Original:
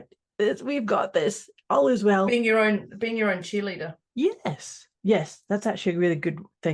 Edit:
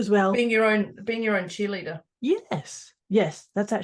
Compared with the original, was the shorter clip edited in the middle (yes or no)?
no